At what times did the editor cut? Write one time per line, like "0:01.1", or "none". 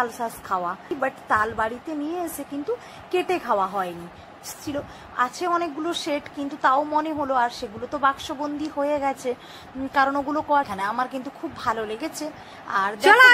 0:00.9
0:04.6
0:10.7